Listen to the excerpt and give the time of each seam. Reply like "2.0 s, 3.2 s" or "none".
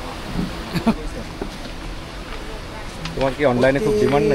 0.9 s

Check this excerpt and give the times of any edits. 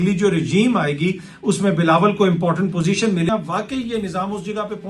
3.3 s

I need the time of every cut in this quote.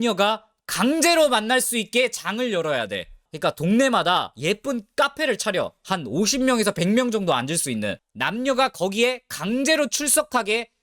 none

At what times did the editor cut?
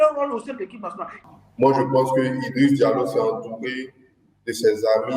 1.2 s

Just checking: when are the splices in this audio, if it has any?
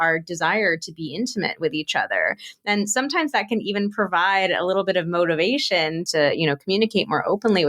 6.0 s

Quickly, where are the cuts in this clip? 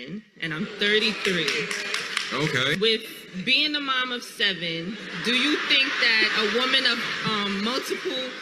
none

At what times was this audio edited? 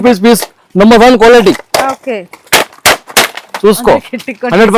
none

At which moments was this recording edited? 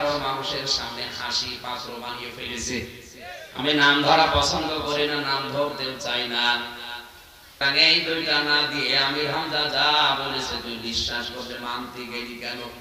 3.8 s, 7.6 s

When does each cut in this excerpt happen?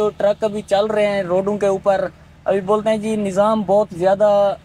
none

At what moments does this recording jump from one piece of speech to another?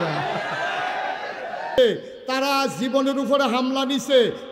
1.8 s

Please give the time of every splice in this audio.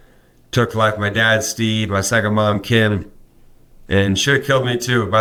none

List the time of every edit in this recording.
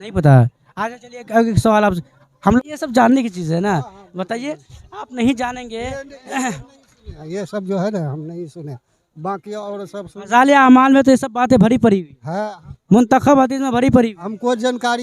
2.6 s

